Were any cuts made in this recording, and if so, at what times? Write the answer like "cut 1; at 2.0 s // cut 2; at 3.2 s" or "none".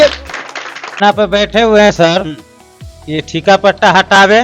cut 1; at 1.0 s